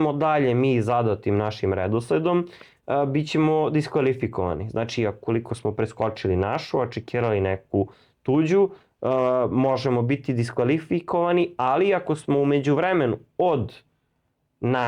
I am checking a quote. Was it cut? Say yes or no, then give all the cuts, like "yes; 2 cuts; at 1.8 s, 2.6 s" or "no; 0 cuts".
no; 0 cuts